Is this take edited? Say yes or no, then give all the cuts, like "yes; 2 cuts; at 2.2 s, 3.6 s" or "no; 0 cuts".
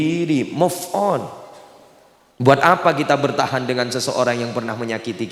no; 0 cuts